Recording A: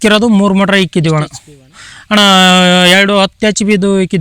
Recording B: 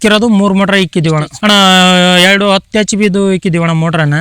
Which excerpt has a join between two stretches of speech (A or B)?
B